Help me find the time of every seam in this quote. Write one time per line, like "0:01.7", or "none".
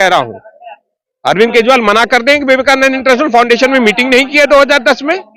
none